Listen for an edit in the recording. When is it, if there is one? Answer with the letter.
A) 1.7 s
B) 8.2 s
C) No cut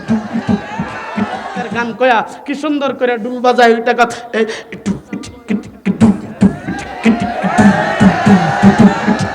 A